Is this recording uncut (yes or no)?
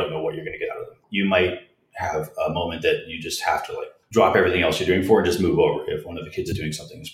no